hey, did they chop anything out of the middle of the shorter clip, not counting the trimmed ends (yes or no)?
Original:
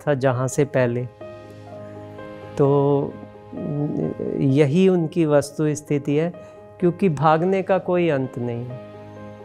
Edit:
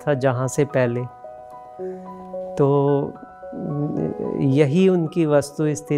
no